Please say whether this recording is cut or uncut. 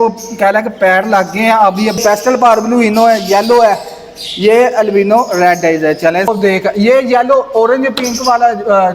cut